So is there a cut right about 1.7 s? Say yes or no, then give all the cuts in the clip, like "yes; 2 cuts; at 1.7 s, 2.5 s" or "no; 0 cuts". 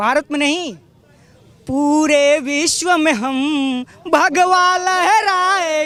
no; 0 cuts